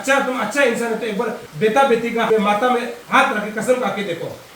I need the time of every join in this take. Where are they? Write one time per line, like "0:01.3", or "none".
0:01.4
0:02.3
0:03.0